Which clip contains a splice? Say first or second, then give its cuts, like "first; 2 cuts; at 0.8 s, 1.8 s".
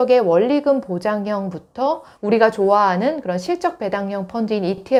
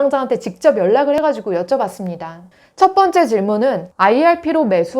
second; 1 cut; at 3.9 s